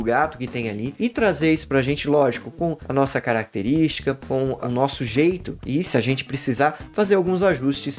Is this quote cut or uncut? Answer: uncut